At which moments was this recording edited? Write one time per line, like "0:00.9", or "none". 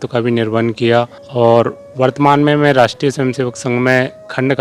0:01.2